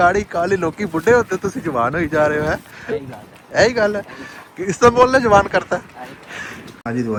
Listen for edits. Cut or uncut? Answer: uncut